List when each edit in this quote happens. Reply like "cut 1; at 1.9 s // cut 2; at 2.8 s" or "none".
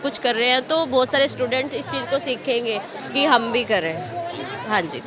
none